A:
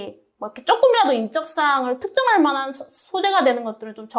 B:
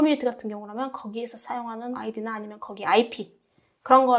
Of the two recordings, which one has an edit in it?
B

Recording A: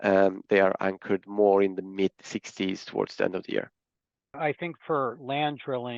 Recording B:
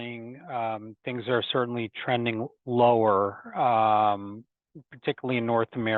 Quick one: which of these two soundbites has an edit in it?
A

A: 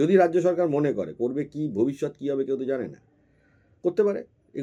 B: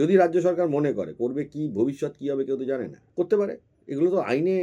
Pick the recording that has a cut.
B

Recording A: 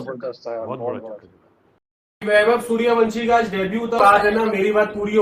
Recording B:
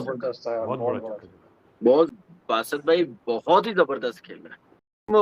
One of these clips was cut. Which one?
A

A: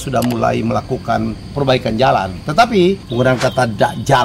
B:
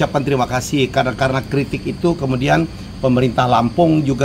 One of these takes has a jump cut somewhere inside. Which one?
A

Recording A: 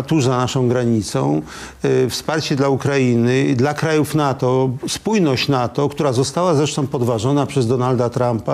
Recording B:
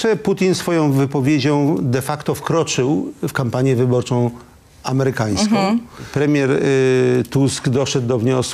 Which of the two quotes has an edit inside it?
B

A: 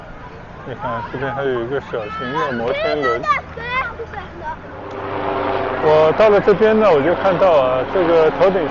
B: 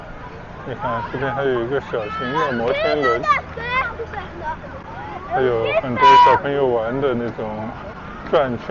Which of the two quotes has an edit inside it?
A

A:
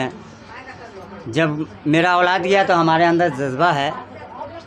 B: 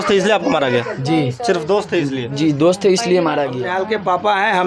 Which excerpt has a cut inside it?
B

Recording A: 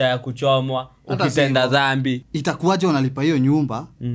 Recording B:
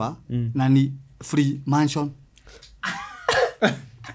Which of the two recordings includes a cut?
A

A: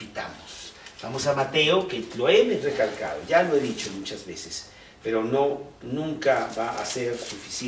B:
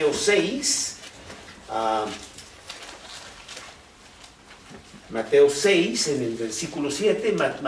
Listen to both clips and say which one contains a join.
A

